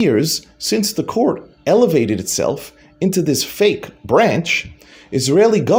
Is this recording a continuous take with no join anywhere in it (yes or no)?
yes